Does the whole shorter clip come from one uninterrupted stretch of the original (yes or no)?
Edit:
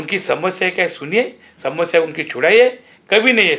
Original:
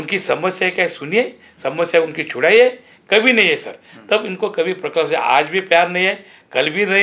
yes